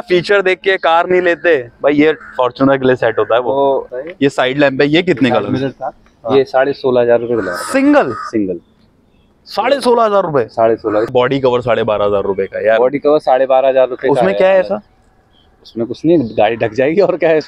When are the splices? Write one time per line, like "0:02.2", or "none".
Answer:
0:03.9
0:11.1